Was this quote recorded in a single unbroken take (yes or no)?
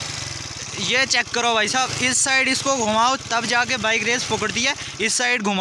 yes